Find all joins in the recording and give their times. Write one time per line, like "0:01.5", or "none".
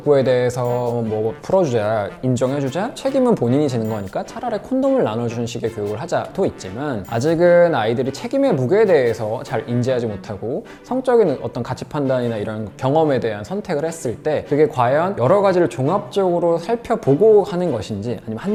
none

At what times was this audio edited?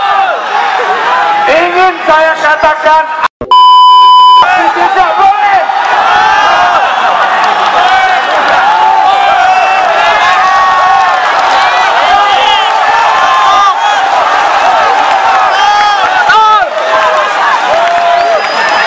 none

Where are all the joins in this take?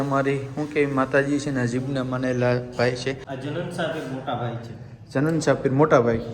0:03.3

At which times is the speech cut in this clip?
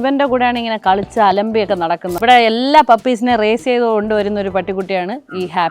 0:02.1

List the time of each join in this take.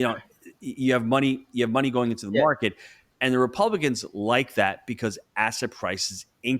none

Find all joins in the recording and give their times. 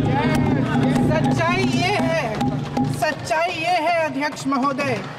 none

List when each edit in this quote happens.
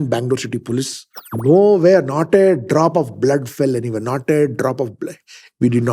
0:01.3

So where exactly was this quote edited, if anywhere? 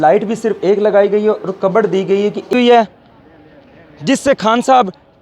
0:02.5

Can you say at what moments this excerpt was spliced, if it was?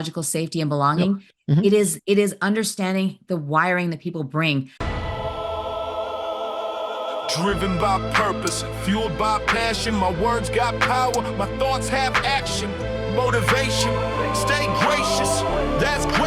0:04.8

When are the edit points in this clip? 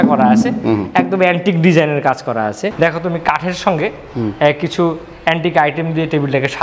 0:02.7

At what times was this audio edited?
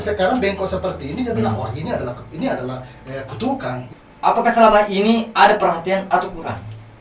0:03.9

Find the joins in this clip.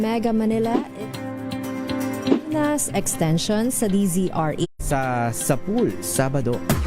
0:04.6

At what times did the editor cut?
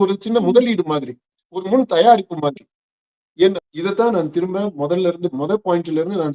0:03.5

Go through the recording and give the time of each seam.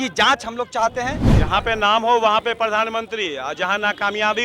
0:01.3

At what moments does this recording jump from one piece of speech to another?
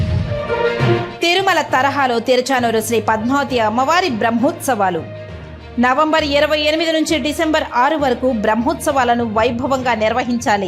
0:01.1

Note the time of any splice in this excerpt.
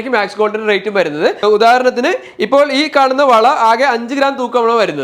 0:01.4

